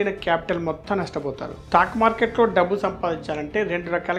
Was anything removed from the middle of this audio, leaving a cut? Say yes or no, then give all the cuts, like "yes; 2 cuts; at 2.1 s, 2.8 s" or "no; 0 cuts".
no; 0 cuts